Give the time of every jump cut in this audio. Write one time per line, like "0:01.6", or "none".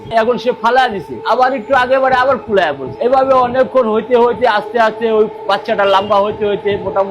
none